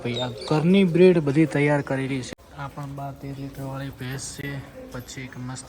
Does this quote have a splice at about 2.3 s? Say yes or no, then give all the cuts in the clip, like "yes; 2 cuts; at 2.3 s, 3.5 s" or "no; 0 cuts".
yes; 1 cut; at 2.3 s